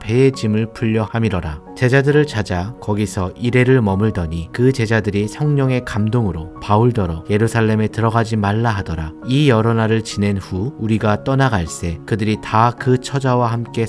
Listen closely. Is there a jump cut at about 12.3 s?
no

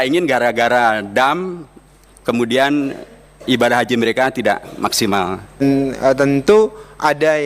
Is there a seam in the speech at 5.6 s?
yes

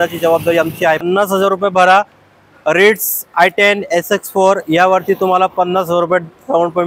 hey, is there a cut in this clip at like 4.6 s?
no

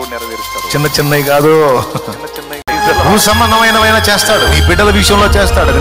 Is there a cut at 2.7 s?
yes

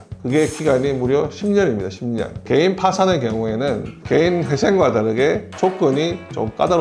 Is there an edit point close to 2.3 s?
yes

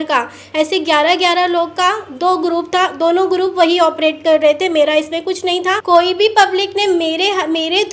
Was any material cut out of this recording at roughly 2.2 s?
no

